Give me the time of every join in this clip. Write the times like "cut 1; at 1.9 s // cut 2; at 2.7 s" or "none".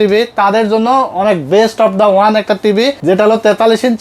cut 1; at 3.0 s